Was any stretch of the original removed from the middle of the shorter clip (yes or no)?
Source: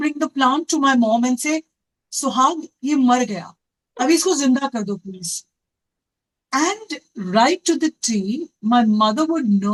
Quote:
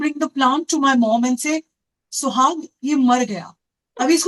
no